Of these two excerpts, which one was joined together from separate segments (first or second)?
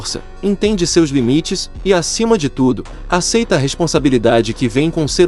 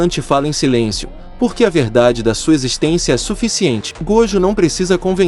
second